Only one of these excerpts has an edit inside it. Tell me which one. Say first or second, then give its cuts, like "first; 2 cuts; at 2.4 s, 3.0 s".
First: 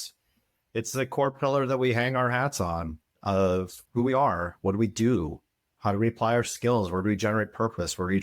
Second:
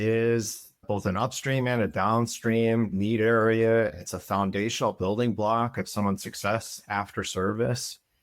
first; 1 cut; at 3.8 s